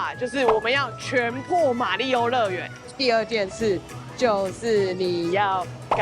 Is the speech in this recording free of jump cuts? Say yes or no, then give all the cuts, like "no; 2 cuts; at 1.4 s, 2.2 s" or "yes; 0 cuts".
no; 1 cut; at 2.9 s